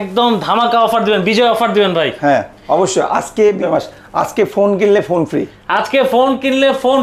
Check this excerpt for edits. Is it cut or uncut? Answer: cut